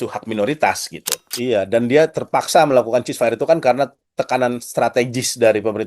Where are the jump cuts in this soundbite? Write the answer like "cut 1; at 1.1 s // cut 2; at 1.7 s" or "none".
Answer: cut 1; at 1.2 s